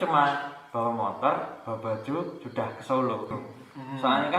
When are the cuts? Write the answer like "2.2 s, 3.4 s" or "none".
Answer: 3.3 s